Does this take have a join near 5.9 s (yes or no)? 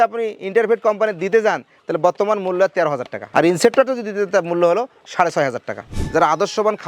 yes